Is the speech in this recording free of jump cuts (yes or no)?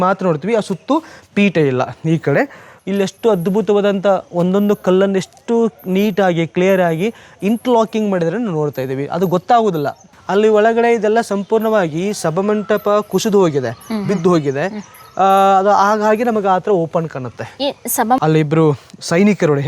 no